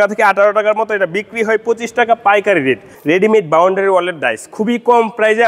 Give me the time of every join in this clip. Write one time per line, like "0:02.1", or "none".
0:02.9